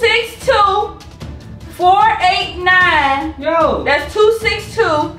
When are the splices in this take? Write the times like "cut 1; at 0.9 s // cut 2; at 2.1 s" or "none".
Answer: none